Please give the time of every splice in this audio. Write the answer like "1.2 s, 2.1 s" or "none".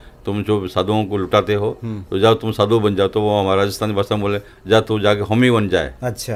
none